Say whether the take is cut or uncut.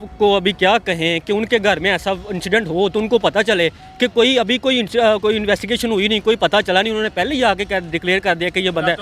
uncut